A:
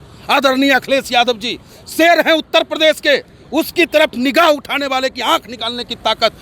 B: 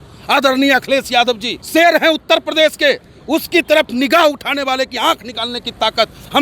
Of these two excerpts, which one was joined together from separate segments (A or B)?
B